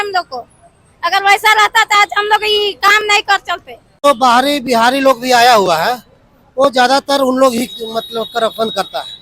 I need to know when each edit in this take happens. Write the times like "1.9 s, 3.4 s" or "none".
4.0 s